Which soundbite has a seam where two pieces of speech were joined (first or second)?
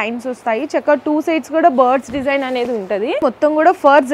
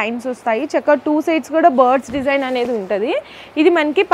first